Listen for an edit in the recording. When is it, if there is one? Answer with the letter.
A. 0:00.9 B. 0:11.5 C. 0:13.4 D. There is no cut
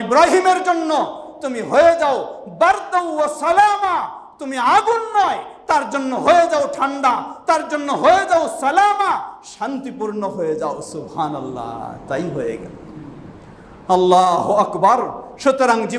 D